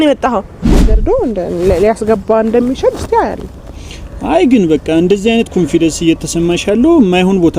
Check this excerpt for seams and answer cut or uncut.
cut